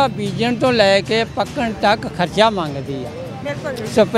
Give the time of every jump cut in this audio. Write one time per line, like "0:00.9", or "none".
none